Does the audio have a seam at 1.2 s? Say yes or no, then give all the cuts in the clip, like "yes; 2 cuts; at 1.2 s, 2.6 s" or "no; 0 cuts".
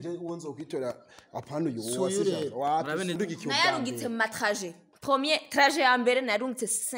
no; 1 cut; at 3.2 s